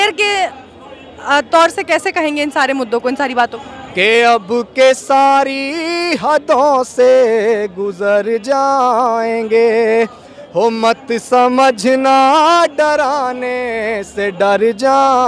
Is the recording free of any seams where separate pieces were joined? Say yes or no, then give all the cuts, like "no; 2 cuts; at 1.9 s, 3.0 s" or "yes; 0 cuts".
no; 1 cut; at 3.6 s